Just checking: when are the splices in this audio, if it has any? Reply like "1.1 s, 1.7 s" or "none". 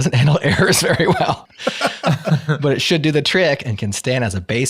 1.5 s

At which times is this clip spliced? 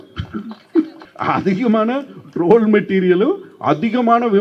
1.0 s

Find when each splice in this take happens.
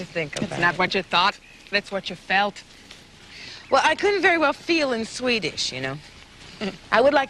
1.1 s

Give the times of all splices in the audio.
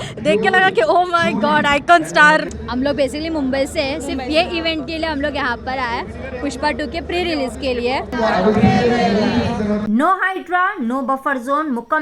2.6 s, 8.1 s, 9.8 s

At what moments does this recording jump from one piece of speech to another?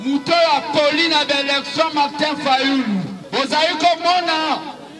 3.2 s

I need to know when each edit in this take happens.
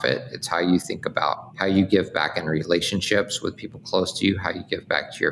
1.5 s

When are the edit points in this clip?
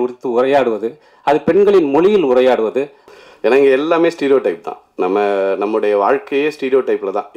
3.0 s

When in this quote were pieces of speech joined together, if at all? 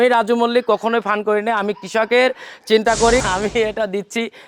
3.2 s

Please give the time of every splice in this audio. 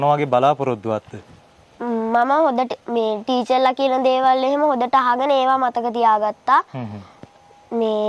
none

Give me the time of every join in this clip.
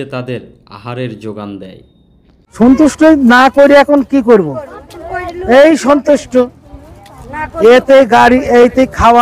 2.4 s

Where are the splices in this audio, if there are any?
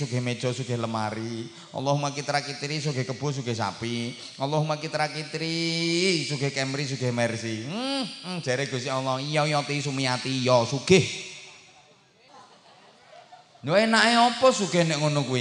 12.3 s

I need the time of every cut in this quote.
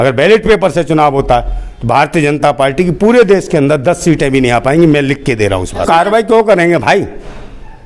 none

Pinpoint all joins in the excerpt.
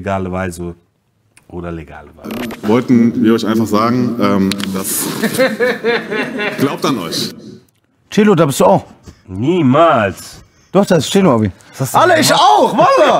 2.3 s

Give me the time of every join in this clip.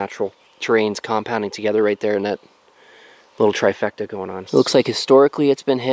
4.4 s

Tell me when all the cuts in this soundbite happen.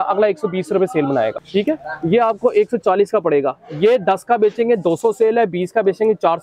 1.4 s

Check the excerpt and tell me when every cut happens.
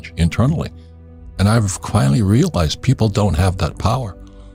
none

